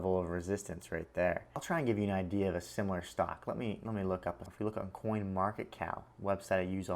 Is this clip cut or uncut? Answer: cut